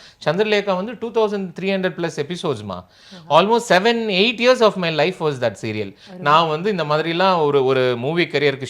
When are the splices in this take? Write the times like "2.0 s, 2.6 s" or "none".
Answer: 6.1 s

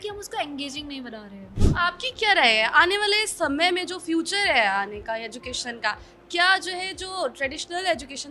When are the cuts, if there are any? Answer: 1.5 s

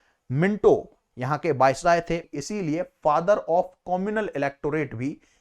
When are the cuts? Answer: 2.3 s

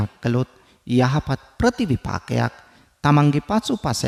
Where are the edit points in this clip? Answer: none

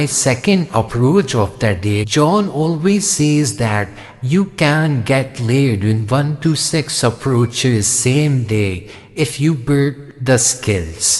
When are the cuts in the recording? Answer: 2.0 s

